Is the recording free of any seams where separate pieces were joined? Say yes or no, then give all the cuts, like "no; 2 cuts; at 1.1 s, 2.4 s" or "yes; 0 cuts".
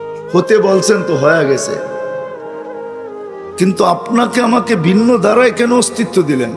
no; 2 cuts; at 1.9 s, 3.6 s